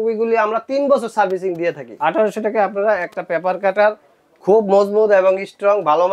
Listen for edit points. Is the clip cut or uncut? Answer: cut